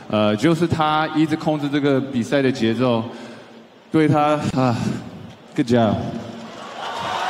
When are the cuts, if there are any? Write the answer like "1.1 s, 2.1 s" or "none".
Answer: none